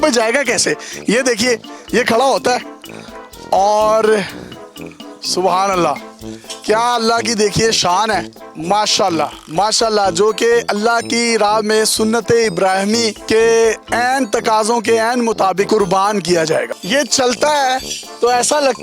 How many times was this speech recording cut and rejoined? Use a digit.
1